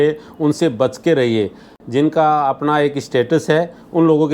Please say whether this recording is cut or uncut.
cut